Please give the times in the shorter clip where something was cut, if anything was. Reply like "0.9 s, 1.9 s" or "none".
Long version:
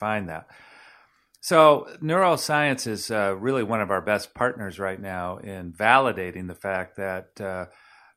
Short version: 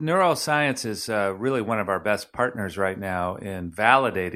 none